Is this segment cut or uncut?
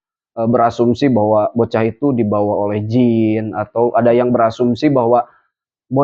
uncut